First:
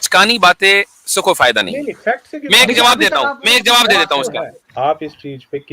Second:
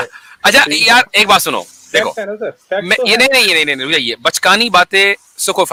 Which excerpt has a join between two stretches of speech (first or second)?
first